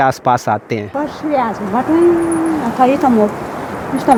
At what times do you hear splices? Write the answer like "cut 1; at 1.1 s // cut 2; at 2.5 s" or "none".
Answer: none

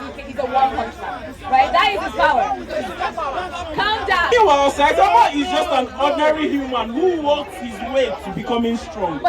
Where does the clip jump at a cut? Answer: cut 1; at 4.3 s

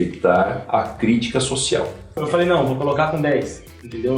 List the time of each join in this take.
cut 1; at 2.2 s

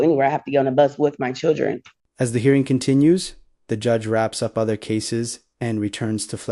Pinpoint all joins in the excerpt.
none

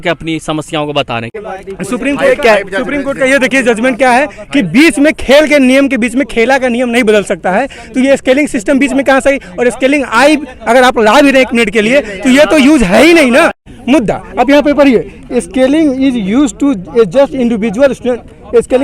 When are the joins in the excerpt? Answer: cut 1; at 1.3 s // cut 2; at 13.7 s

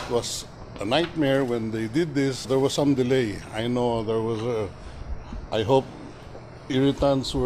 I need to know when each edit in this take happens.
none

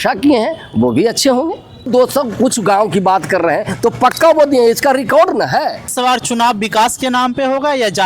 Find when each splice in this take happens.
cut 1; at 1.9 s // cut 2; at 5.9 s

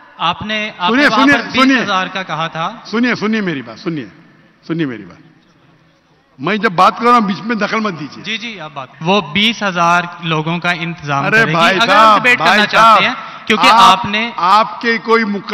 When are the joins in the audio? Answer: cut 1; at 8.8 s

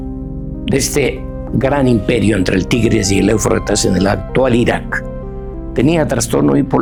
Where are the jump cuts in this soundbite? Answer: none

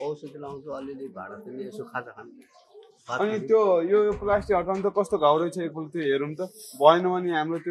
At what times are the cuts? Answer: none

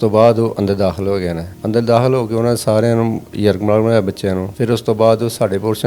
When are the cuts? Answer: cut 1; at 4.5 s

